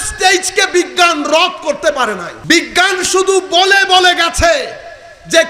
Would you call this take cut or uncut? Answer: cut